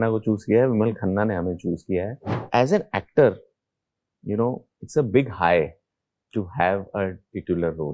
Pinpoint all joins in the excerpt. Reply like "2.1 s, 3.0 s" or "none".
2.5 s